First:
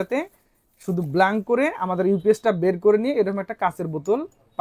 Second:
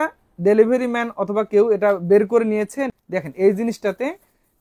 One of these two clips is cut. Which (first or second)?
second